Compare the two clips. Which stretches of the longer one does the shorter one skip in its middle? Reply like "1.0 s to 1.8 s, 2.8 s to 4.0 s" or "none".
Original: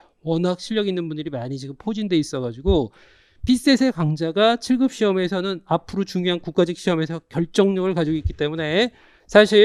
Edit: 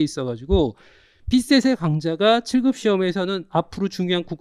none

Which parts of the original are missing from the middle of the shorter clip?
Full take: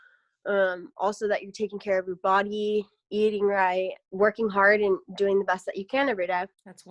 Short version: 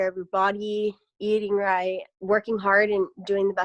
none

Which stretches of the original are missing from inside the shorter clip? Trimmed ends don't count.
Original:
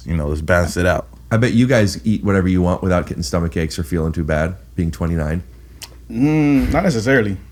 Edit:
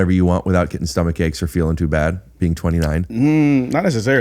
5.4 s to 6.1 s

